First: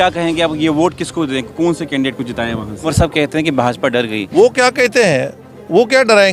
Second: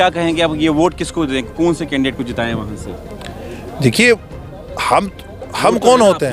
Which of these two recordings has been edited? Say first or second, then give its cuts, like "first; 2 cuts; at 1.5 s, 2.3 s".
first; 1 cut; at 2.9 s